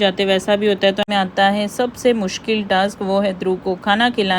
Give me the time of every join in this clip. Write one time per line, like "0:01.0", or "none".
0:01.0